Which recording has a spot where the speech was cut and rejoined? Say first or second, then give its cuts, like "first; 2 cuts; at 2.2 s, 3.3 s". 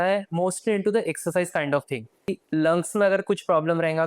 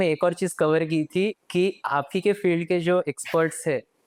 first; 1 cut; at 2.4 s